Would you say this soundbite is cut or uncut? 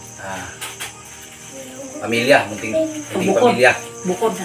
uncut